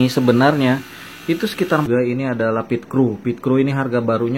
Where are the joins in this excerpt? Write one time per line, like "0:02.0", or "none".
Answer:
0:01.9